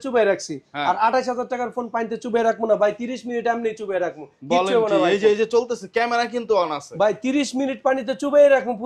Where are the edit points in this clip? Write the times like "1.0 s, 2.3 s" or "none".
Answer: none